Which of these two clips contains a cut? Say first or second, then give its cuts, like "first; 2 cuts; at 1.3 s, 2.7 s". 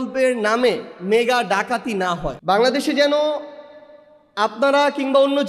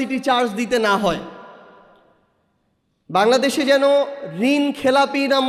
first; 1 cut; at 2.3 s